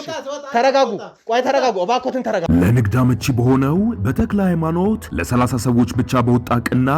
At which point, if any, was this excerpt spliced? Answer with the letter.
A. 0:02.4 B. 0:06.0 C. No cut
A